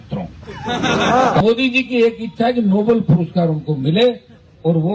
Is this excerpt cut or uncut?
cut